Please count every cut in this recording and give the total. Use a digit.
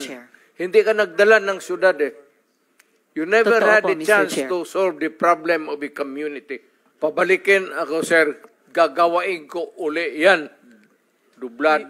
1